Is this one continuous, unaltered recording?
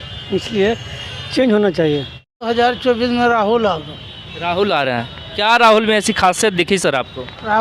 no; 1 cut; at 2.3 s

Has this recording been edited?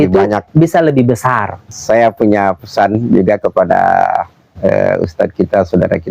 yes; 1 cut; at 1.8 s

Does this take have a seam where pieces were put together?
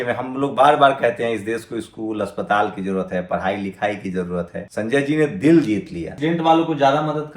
yes; 2 cuts; at 4.6 s, 6.1 s

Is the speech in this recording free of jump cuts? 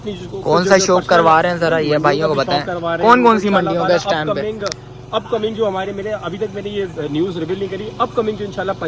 yes; 0 cuts

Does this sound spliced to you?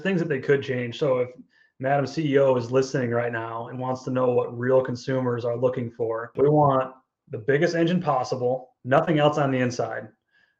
yes; 2 cuts; at 6.3 s, 8.7 s

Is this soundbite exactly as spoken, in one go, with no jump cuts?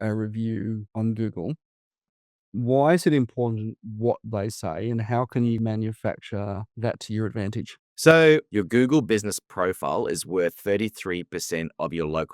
no; 2 cuts; at 2.0 s, 5.6 s

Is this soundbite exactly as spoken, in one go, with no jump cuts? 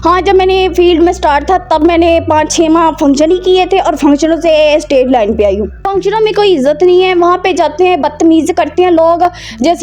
no; 1 cut; at 5.8 s

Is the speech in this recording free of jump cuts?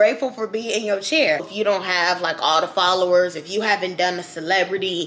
no; 1 cut; at 1.5 s

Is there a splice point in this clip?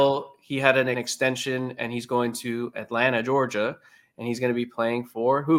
yes; 1 cut; at 1.0 s

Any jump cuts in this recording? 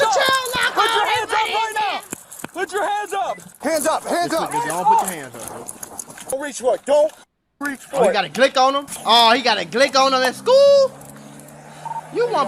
yes; 3 cuts; at 3.5 s, 6.3 s, 8.9 s

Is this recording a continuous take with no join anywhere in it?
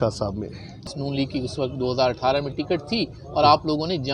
no; 1 cut; at 0.9 s

